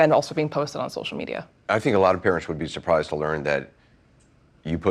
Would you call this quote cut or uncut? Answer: uncut